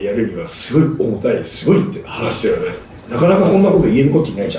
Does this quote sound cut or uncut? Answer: uncut